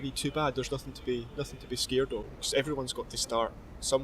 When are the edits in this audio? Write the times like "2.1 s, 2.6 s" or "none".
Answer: 2.3 s

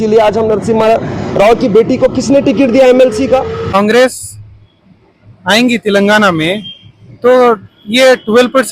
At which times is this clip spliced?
3.7 s

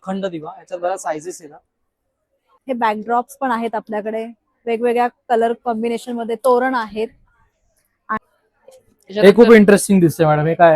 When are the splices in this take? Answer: 2.6 s, 8.2 s

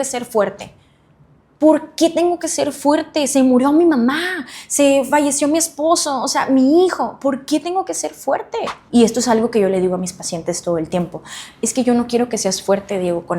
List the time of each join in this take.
8.8 s

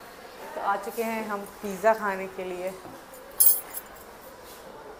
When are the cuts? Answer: none

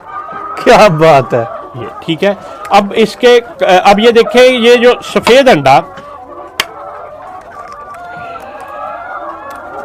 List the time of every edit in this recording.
none

